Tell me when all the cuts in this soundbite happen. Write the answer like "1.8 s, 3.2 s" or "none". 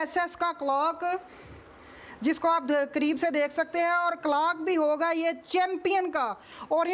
none